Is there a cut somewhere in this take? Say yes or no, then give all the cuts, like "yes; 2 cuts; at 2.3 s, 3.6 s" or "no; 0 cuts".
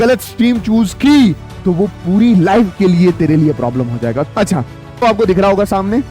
yes; 1 cut; at 5.0 s